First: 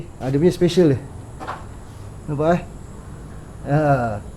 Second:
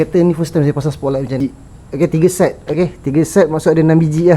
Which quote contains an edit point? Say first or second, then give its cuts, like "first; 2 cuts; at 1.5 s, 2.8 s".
second; 1 cut; at 1.4 s